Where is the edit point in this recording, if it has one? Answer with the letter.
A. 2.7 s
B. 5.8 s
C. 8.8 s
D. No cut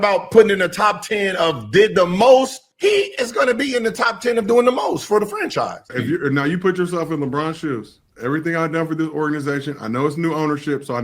B